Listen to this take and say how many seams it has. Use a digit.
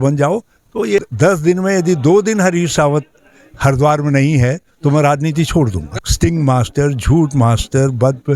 2